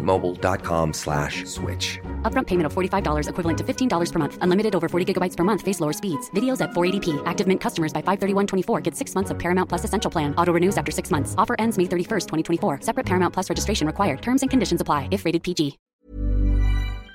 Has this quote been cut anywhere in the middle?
yes; 1 cut; at 15.8 s

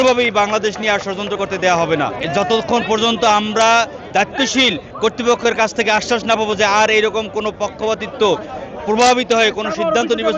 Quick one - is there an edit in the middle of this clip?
no; 0 cuts

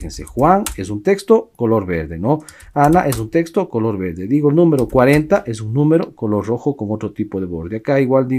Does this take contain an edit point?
no; 0 cuts

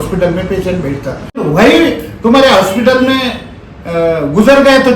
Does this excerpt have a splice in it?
yes; 1 cut; at 1.4 s

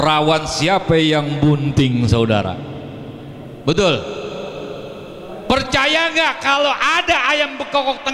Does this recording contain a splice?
no; 0 cuts

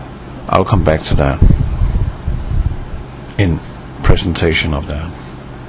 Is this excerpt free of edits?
no; 1 cut; at 2.5 s

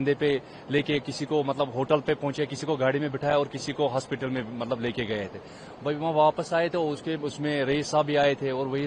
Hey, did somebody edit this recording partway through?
no; 0 cuts

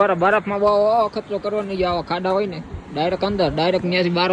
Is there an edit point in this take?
no; 0 cuts

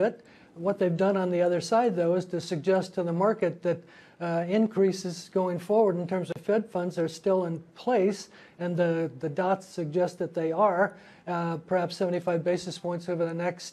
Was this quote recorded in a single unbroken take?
no; 1 cut; at 4.8 s

